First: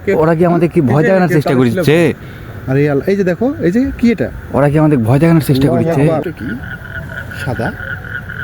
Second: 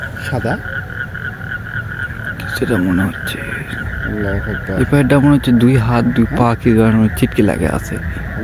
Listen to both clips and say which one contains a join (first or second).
first